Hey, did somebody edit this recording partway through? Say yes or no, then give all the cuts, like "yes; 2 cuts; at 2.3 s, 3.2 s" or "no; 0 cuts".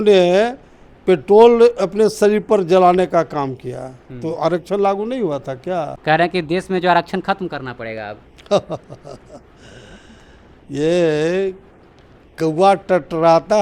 yes; 1 cut; at 5.9 s